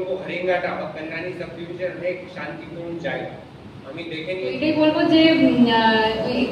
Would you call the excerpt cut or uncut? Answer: cut